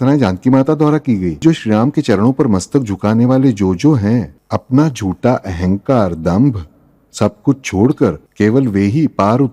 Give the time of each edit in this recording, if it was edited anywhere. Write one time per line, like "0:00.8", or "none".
0:01.4
0:04.4
0:08.2